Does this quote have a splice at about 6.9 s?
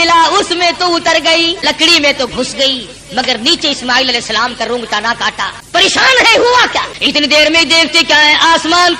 yes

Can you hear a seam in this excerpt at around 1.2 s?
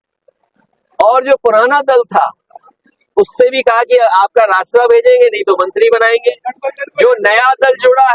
no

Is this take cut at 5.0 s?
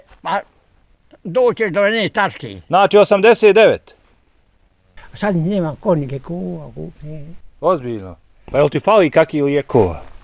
yes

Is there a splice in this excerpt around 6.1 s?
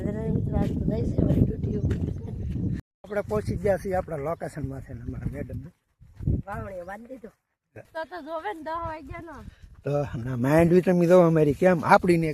no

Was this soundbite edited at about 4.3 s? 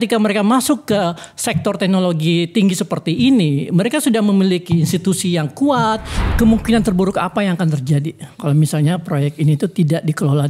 no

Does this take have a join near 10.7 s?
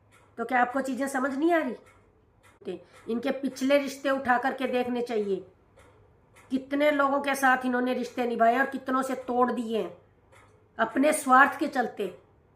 no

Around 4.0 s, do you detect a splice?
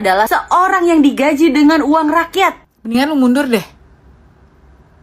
no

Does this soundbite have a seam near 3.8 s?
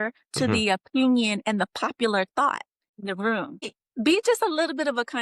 yes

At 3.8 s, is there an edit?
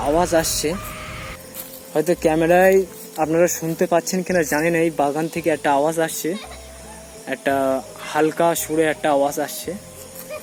no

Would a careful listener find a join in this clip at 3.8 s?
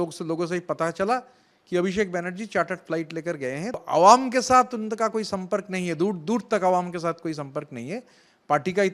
yes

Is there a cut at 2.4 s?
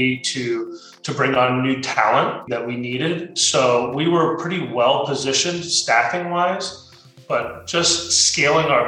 yes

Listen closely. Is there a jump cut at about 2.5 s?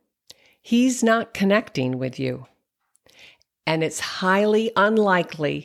no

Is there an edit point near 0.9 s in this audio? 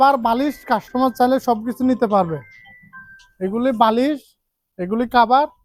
no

